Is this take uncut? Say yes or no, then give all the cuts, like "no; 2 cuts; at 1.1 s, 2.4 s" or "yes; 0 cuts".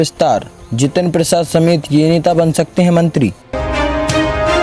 no; 1 cut; at 3.4 s